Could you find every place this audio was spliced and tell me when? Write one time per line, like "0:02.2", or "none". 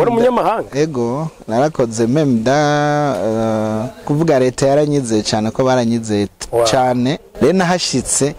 0:04.1
0:07.2